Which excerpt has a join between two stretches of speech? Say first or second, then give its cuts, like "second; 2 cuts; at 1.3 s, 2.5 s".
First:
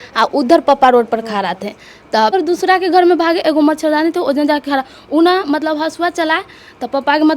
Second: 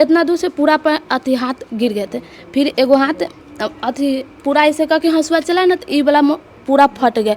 first; 1 cut; at 2.3 s